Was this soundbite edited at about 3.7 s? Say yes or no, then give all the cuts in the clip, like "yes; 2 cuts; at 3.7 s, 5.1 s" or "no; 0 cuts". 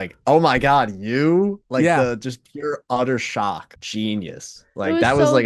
yes; 1 cut; at 3.7 s